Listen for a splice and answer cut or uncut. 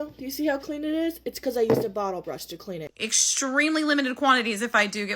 cut